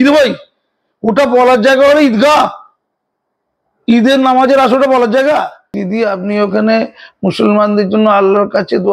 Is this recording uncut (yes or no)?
no